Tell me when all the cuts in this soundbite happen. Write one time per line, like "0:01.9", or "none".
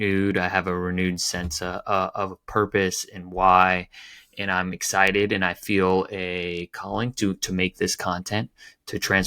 none